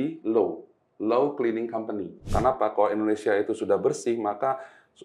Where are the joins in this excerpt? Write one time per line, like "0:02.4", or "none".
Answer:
0:02.3